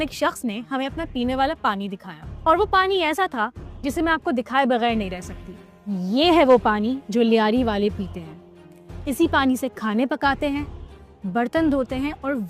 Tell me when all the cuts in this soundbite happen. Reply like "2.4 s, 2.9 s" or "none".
none